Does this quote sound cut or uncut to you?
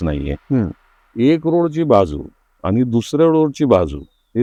uncut